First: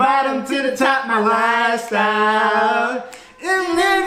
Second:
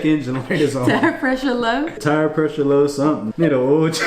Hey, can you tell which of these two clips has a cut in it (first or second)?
second